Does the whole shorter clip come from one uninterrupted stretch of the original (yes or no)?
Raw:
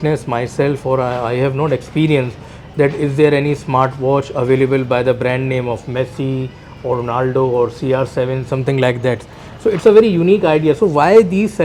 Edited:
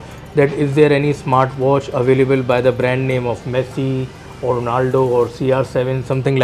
yes